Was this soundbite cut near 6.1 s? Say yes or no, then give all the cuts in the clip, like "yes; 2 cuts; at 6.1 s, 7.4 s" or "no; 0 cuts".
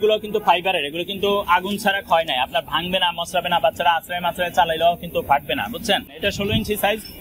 yes; 1 cut; at 6.1 s